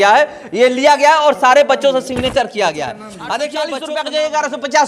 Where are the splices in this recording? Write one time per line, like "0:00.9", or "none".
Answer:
0:03.8